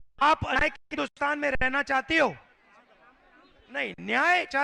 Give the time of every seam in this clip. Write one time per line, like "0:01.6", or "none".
none